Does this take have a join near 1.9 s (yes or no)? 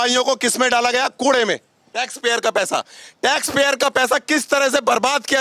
yes